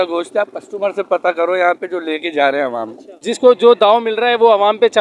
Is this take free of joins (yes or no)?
no